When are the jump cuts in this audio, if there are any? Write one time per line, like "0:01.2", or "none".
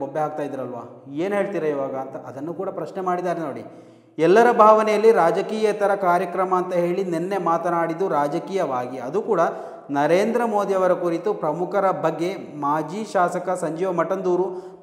none